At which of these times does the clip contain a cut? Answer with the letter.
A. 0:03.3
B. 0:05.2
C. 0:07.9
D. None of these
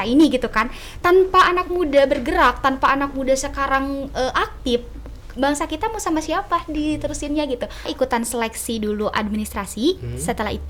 C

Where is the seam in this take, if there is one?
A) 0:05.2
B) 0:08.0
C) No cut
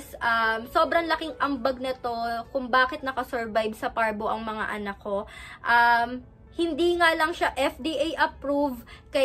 C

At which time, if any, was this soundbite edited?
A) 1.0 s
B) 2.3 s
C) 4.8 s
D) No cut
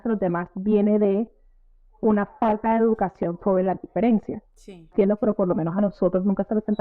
C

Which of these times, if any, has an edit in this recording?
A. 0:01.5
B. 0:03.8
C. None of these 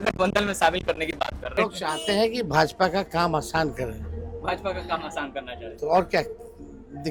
A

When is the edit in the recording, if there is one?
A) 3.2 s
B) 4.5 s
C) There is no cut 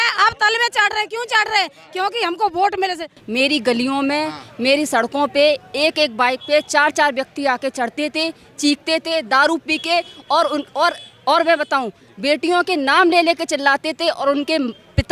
A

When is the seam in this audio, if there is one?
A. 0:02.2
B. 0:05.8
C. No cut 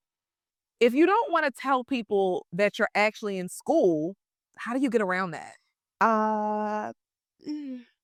C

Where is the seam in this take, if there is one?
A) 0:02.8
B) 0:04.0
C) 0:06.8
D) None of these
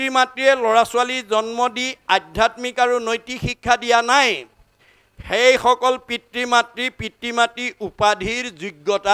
D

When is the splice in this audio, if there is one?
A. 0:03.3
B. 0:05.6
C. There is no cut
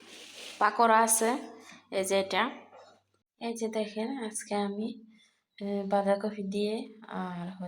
A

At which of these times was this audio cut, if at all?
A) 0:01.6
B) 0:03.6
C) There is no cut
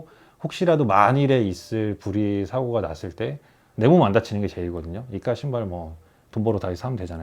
C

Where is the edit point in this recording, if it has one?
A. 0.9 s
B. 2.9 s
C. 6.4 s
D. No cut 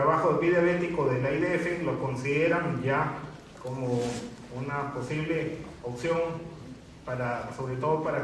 A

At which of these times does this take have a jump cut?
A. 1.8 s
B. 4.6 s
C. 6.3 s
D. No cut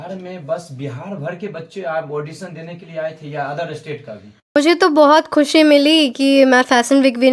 B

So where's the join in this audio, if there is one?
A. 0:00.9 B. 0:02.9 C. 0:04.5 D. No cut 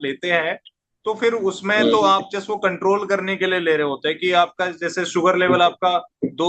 D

